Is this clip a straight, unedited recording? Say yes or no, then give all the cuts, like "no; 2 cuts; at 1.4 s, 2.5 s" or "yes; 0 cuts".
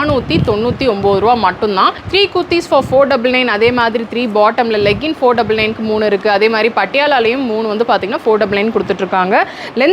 no; 1 cut; at 2.0 s